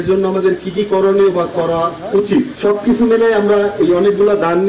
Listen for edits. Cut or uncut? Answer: cut